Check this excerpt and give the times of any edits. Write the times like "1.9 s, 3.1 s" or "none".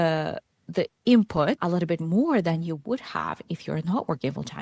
none